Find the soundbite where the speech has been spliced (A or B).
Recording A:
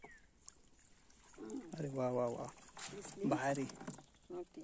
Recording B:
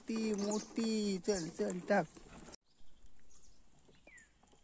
B